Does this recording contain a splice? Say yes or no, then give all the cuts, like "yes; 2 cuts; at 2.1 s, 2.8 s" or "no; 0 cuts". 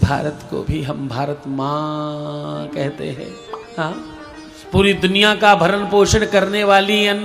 no; 0 cuts